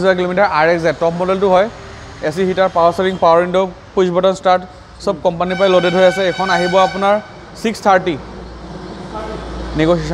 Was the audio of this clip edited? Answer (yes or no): no